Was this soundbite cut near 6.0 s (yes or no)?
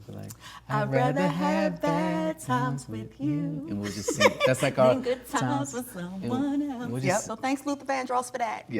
no